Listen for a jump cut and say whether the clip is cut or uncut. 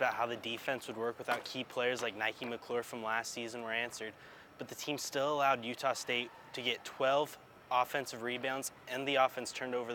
uncut